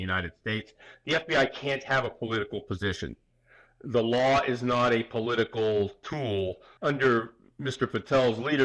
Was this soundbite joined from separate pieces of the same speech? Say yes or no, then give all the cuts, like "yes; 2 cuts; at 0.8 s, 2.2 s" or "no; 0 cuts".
yes; 1 cut; at 6.7 s